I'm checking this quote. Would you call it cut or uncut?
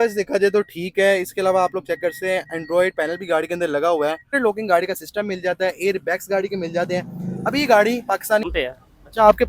cut